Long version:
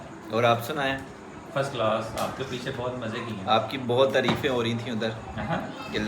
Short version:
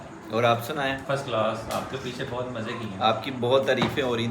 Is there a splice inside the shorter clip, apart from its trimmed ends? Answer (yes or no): yes